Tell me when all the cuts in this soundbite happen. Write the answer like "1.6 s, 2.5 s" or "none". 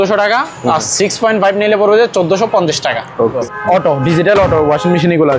3.4 s

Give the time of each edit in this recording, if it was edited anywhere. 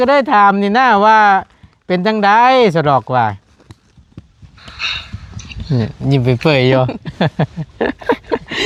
none

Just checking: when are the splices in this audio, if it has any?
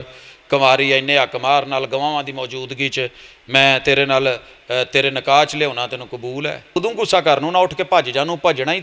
6.8 s

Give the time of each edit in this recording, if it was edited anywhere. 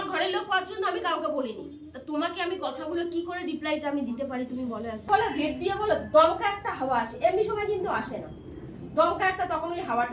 5.1 s

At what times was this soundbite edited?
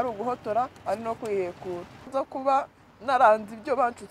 2.1 s

